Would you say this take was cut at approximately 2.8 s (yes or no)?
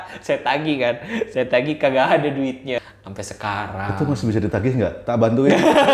yes